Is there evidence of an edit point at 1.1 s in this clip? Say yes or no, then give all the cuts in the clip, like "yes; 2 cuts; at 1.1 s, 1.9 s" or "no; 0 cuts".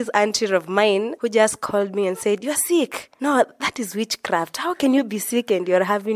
yes; 1 cut; at 1.1 s